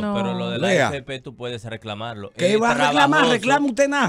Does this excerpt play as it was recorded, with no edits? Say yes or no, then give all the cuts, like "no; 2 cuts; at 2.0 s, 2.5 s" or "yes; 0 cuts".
yes; 0 cuts